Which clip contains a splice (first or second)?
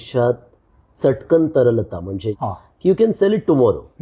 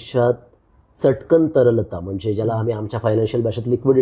first